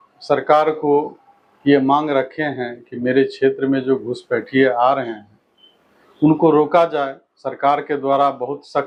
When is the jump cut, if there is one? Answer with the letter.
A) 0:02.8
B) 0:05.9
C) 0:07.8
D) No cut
D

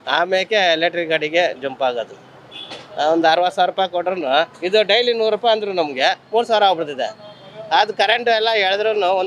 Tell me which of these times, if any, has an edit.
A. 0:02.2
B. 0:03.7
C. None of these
C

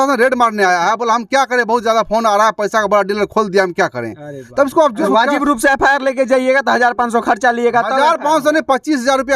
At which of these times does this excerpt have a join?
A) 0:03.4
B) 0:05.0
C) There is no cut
B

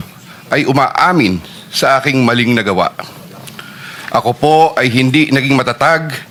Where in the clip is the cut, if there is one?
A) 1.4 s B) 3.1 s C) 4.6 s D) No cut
D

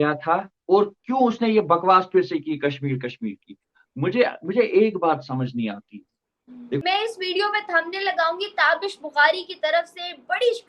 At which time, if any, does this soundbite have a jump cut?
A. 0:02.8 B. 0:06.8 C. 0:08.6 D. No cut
B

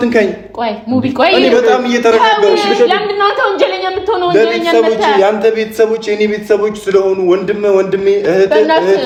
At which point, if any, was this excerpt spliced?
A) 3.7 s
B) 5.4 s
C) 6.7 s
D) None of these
D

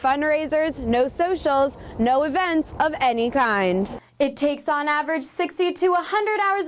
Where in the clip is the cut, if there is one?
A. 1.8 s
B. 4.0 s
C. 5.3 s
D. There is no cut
B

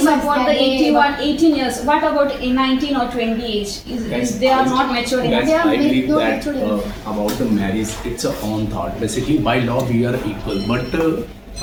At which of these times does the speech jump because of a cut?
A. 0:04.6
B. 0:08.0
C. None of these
C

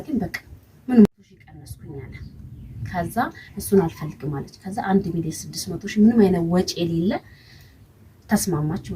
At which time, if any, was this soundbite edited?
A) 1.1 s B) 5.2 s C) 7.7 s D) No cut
A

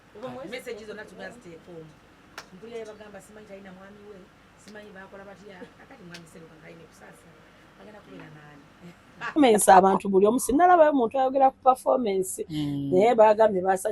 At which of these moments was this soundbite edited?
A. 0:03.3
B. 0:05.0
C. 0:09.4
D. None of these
C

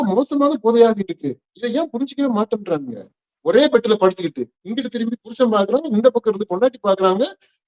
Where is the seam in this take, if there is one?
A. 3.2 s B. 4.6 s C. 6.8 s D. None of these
A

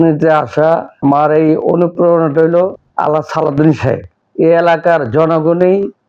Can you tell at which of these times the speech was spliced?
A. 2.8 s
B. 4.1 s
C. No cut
B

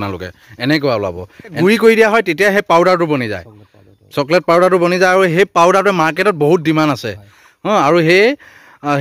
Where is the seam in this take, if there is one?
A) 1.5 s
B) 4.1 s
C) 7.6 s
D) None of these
A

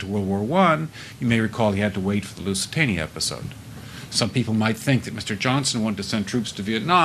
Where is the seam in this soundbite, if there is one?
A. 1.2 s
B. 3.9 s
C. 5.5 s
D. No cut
B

